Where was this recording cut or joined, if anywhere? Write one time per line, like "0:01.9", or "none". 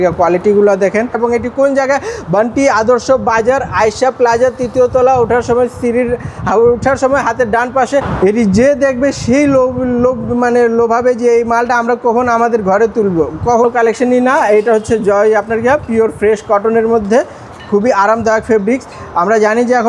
0:01.2
0:08.1
0:13.6